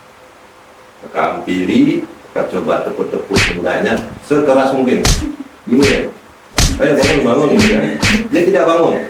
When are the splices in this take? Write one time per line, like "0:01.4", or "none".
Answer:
none